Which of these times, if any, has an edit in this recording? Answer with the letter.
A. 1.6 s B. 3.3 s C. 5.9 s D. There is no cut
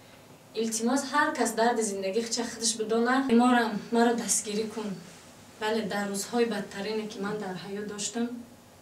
B